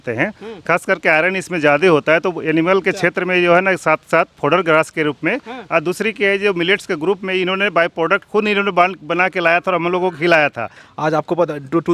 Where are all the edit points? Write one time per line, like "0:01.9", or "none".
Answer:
0:10.8